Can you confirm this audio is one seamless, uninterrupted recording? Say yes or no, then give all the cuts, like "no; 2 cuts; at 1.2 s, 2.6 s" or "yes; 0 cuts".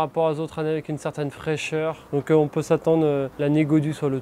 no; 2 cuts; at 2.0 s, 3.3 s